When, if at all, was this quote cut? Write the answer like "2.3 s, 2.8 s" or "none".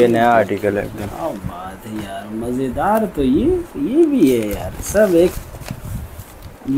5.4 s